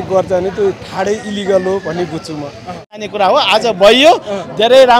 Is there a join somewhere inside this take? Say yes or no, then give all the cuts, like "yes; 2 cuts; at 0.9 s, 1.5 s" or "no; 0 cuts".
yes; 1 cut; at 3.0 s